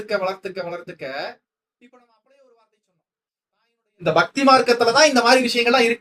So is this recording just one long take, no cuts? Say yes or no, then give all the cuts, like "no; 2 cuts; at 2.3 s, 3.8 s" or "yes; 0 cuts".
no; 1 cut; at 3.9 s